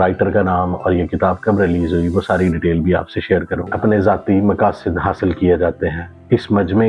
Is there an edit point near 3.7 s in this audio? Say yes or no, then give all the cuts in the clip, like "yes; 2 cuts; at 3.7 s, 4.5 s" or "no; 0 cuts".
yes; 1 cut; at 3.7 s